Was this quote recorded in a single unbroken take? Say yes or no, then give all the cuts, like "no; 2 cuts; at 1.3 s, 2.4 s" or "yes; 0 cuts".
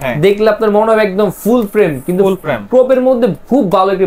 yes; 0 cuts